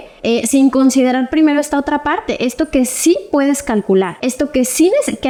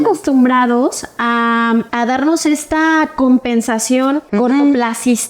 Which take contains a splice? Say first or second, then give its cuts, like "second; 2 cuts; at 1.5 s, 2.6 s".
second; 1 cut; at 4.3 s